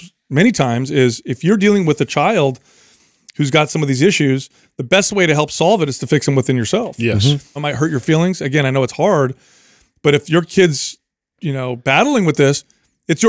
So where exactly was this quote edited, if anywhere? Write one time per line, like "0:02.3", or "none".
0:07.6